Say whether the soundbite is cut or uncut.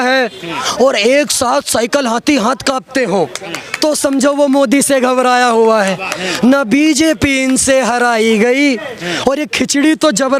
uncut